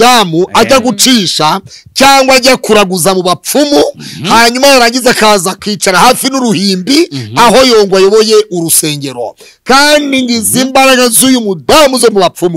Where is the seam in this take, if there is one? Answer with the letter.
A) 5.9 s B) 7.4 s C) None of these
C